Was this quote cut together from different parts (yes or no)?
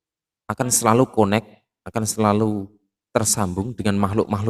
no